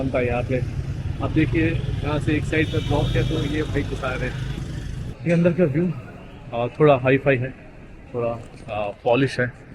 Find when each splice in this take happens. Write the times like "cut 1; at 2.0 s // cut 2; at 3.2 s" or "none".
cut 1; at 5.0 s